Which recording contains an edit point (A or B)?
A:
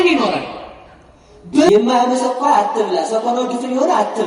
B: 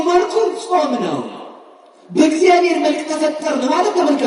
A